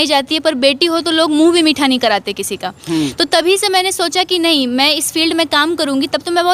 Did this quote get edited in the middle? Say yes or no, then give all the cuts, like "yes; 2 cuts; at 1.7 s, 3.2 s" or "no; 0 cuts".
no; 0 cuts